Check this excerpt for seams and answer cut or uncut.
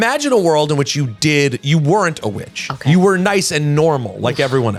uncut